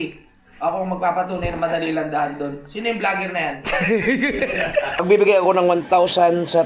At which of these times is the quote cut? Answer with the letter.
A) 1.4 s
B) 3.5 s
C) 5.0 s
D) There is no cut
C